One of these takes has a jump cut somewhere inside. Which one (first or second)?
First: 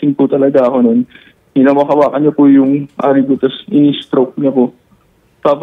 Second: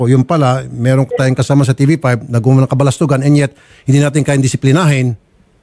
first